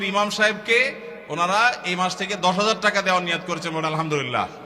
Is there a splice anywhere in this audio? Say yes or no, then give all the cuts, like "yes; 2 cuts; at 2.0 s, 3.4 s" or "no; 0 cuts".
no; 0 cuts